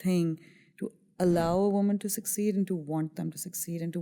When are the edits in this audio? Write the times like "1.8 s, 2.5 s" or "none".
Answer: none

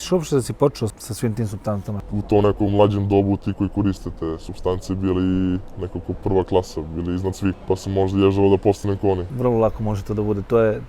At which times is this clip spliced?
2.1 s, 9.3 s

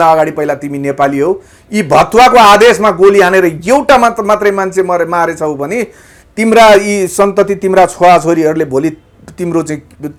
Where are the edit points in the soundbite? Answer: none

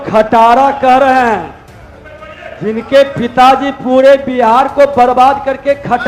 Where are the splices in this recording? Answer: none

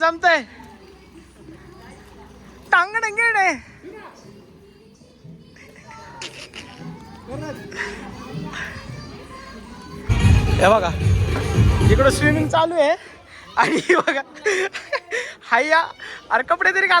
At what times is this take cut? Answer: 10.1 s

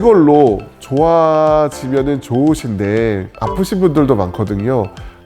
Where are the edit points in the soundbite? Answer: none

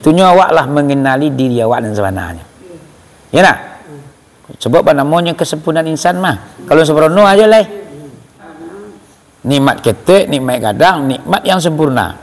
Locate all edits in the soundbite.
8.5 s

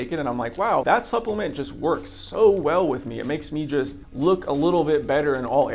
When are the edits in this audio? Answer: 4.0 s

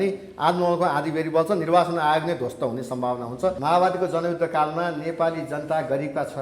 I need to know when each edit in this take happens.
3.6 s

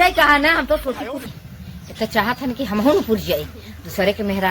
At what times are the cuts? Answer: 1.3 s

